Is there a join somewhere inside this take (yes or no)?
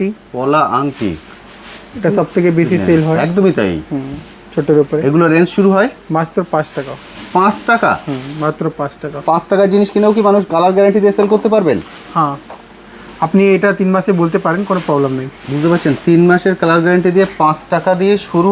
no